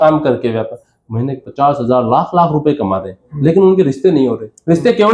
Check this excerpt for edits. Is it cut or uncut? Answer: uncut